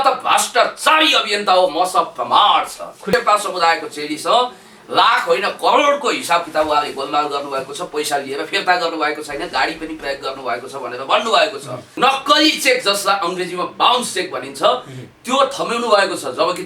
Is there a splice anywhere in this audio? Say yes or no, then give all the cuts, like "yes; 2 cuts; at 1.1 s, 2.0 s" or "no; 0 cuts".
yes; 2 cuts; at 3.1 s, 11.9 s